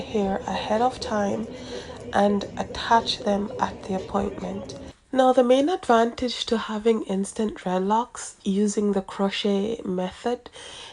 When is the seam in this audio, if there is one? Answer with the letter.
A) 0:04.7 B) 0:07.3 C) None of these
A